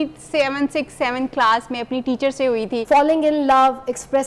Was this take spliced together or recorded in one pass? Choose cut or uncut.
cut